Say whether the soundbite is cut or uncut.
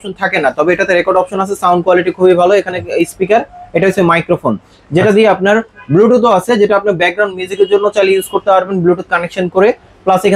uncut